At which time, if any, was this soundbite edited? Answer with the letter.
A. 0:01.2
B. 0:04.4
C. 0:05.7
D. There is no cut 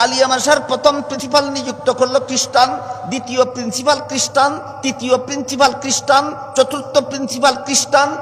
A